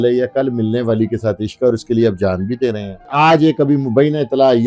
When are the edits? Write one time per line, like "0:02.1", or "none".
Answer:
0:03.1